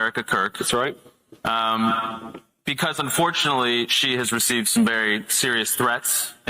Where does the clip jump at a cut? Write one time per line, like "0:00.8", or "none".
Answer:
0:01.0